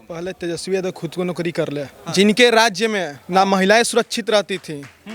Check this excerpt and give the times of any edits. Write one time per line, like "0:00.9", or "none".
0:01.9
0:03.2